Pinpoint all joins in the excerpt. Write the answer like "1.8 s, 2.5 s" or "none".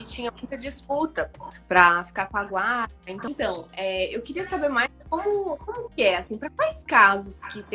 3.3 s